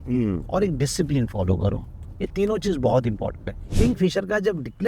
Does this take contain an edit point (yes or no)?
yes